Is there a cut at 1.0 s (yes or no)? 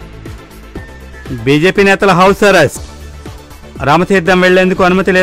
yes